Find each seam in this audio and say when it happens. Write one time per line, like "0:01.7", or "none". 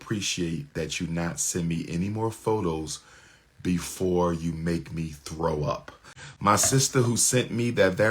0:06.2